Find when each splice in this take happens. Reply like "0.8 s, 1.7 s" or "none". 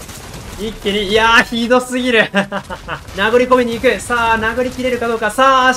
3.1 s

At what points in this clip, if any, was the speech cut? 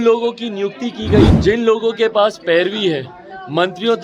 1.3 s

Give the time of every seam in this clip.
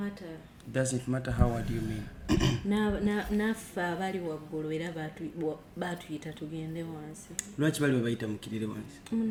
none

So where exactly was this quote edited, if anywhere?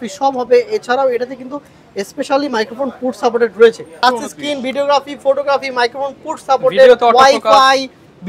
4.0 s

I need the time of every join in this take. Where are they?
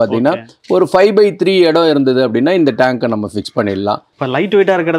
4.1 s

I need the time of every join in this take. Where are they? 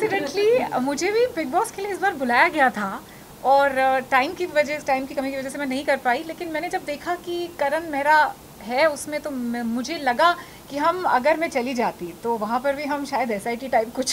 none

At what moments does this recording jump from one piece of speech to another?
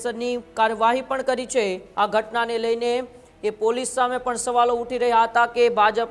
1.8 s

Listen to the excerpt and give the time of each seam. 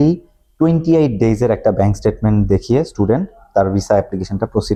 none

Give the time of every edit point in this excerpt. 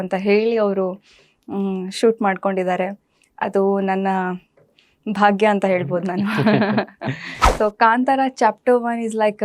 7.3 s

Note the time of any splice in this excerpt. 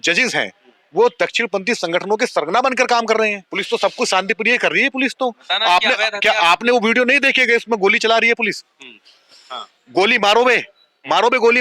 3.5 s

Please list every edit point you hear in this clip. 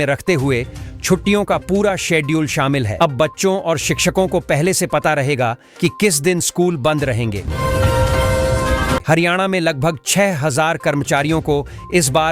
7.4 s, 9.0 s

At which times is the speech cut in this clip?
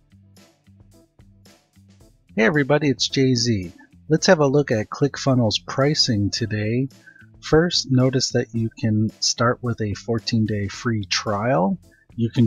2.4 s

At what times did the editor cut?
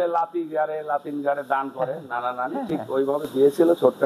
none

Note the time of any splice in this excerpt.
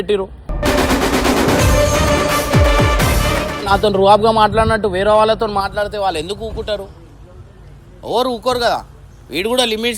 3.6 s

